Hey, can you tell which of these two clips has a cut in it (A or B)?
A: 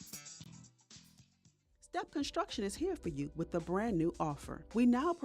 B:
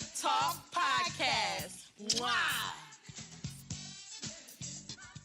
A